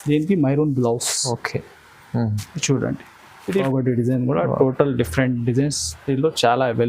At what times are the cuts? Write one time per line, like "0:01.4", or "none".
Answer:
0:03.6